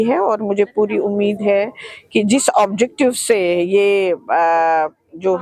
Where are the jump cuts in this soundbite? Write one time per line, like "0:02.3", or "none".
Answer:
none